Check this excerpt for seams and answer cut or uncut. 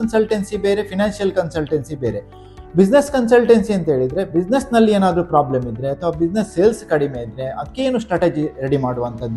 uncut